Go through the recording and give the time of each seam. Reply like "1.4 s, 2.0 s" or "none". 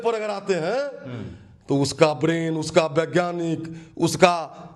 none